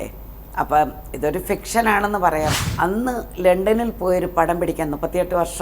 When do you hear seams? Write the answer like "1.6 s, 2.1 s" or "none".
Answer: 2.6 s